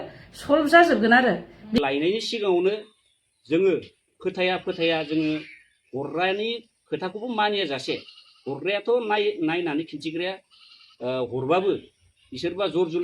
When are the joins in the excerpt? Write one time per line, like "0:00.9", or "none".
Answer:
0:01.5